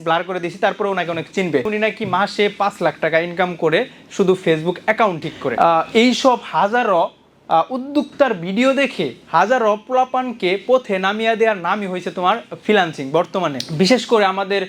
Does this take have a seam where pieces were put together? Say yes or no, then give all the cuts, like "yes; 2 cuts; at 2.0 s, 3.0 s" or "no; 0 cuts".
yes; 3 cuts; at 1.7 s, 5.5 s, 13.6 s